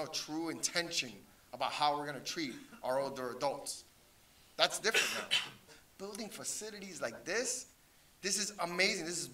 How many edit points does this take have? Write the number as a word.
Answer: one